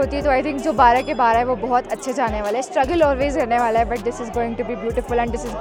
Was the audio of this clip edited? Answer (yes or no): no